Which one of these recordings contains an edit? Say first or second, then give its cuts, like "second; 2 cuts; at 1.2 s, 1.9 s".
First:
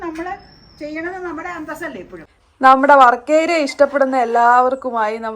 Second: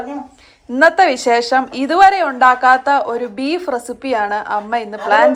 first; 1 cut; at 2.2 s